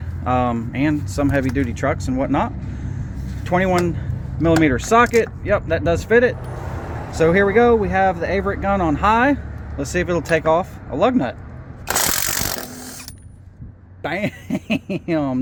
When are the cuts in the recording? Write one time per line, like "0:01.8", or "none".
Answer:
none